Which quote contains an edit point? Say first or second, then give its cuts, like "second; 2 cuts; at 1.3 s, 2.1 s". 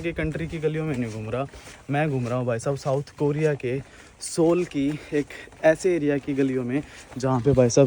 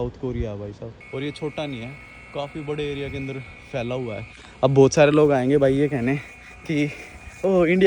second; 1 cut; at 0.9 s